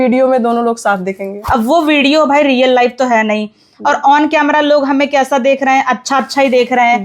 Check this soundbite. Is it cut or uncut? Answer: cut